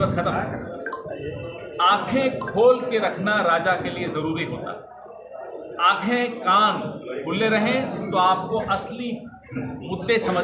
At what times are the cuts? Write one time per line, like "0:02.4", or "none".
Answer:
none